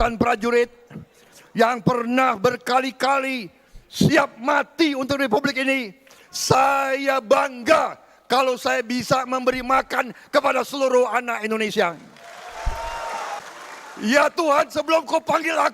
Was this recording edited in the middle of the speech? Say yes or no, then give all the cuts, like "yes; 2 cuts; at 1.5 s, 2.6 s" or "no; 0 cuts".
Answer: yes; 1 cut; at 13.4 s